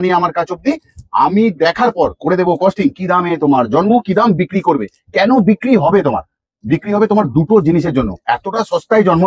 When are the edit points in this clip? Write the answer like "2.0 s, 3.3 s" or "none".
none

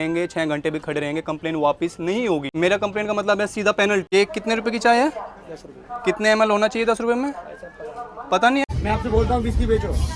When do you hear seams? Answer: 2.5 s, 4.1 s, 8.7 s

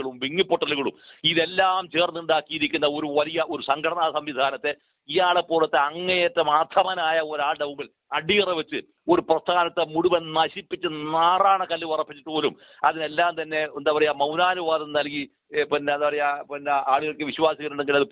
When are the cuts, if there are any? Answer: none

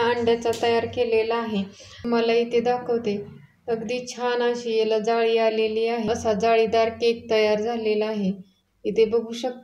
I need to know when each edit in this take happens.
2.1 s, 6.1 s

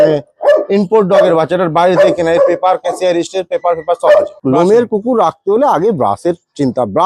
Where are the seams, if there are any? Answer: 4.4 s

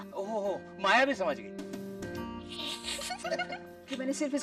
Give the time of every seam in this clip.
3.2 s

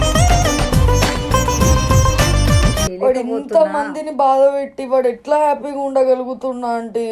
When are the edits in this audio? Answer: 2.9 s

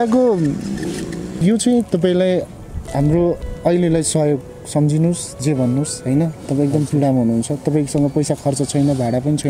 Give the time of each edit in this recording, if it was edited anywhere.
1.4 s

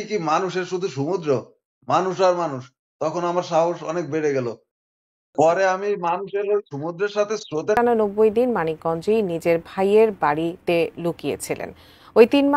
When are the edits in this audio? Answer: 7.8 s

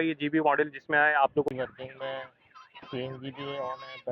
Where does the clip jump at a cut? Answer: 1.5 s

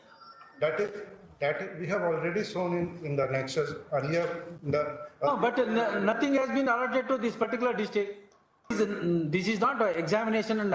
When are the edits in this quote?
8.7 s

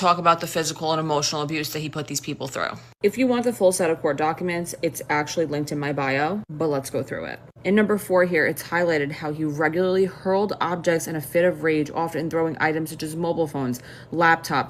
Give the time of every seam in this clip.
none

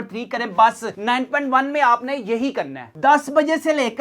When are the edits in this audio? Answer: 3.0 s

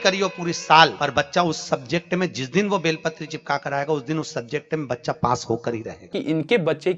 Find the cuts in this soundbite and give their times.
0.9 s, 6.0 s

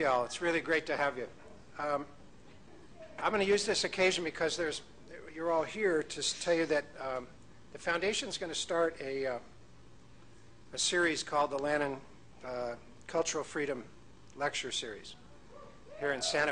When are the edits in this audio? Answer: 8.8 s

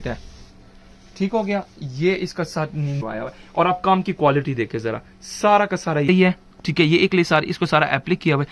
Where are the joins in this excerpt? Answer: 3.0 s, 6.1 s

